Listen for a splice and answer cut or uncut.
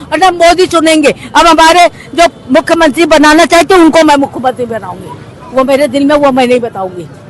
uncut